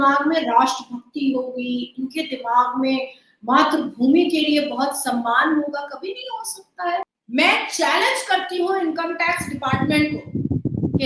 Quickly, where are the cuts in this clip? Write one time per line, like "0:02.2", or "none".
0:07.2